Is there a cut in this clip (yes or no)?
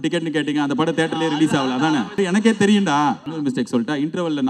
yes